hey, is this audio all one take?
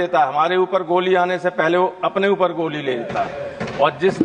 yes; 0 cuts

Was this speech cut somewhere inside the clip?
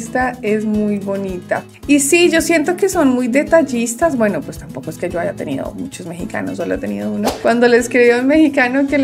yes; 1 cut; at 7.3 s

